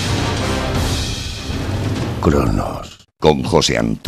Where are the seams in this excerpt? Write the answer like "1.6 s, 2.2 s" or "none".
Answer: 1.0 s